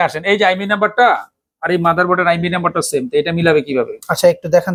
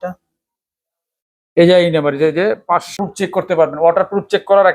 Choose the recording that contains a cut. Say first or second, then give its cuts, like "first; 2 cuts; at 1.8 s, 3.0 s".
second; 1 cut; at 3.0 s